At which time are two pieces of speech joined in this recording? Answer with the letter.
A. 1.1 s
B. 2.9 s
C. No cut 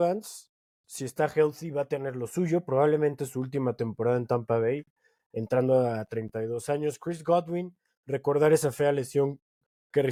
C